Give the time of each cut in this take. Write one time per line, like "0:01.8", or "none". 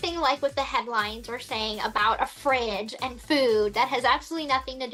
none

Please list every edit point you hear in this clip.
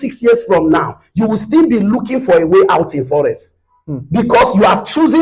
none

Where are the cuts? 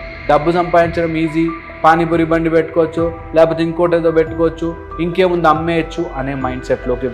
none

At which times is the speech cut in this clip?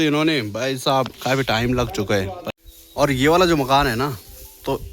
0:02.4

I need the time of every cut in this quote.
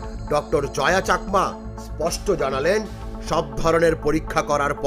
none

